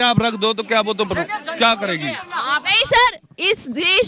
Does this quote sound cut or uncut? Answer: uncut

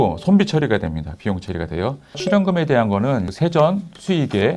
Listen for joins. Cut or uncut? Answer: cut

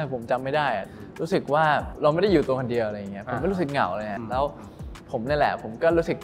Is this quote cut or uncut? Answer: cut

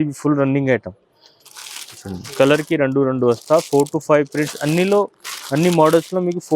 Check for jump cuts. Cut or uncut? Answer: uncut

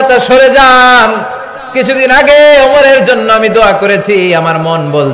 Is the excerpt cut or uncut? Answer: uncut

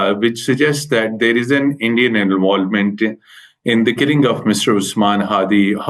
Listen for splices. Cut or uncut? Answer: uncut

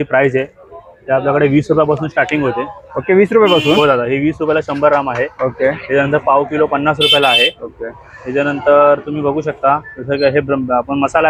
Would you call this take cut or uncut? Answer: uncut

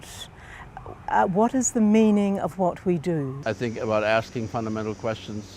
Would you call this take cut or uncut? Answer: cut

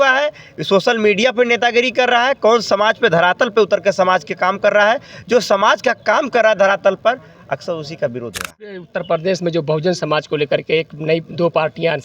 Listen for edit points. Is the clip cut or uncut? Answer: cut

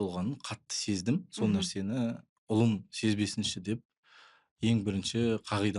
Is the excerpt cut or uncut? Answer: uncut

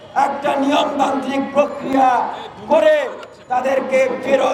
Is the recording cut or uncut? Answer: uncut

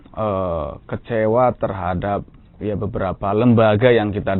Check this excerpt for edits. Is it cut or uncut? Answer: uncut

